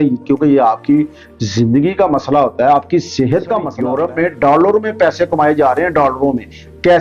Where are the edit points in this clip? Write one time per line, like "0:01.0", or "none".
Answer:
0:03.7

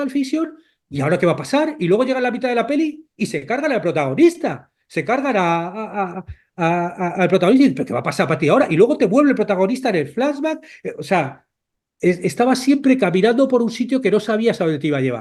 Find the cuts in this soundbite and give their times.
none

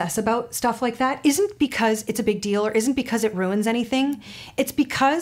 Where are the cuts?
none

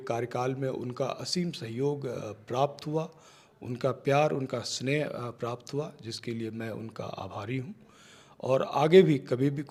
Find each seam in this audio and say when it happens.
none

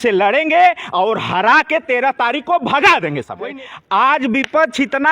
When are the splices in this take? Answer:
0:03.5

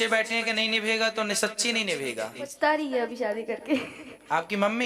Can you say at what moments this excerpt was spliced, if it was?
0:02.4

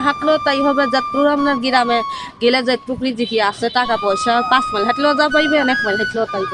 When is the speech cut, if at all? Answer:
none

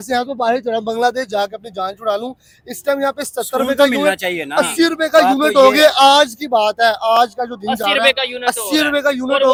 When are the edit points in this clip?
none

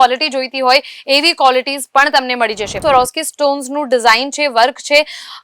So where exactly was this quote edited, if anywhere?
0:02.8

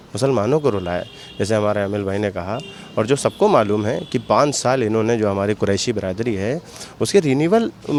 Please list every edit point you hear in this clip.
none

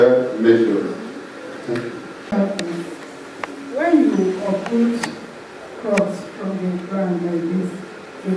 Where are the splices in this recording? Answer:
0:02.3

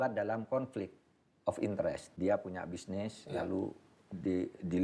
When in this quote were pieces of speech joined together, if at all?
0:02.1

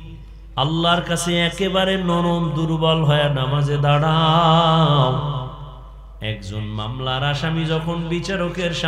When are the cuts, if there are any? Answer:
none

